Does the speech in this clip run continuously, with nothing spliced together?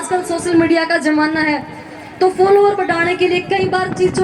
yes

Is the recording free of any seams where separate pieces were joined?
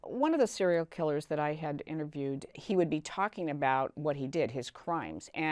no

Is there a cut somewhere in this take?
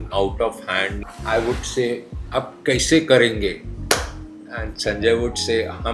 yes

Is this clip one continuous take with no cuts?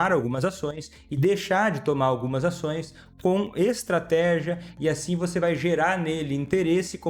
yes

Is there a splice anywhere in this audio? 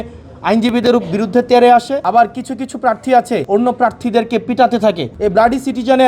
yes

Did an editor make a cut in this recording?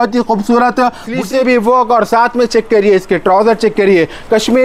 yes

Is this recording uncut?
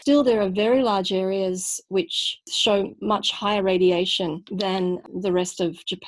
yes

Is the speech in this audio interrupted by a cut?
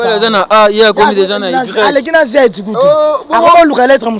no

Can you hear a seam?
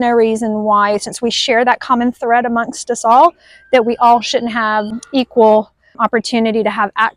yes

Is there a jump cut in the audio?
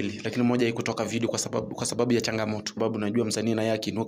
yes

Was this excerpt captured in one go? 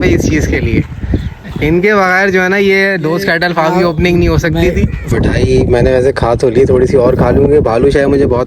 no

